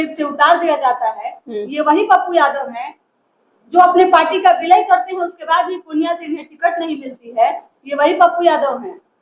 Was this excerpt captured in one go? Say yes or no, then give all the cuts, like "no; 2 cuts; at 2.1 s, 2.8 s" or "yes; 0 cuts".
yes; 0 cuts